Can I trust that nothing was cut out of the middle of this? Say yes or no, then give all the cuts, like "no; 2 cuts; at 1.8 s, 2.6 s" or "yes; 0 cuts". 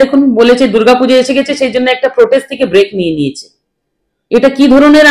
yes; 0 cuts